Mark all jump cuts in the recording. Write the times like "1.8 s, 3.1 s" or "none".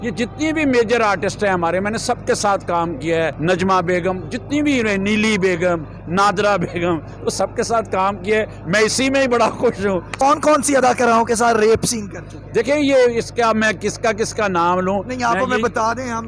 3.4 s, 10.2 s